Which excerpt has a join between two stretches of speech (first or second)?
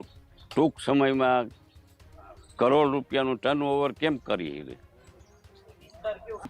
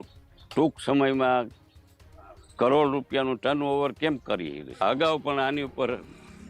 second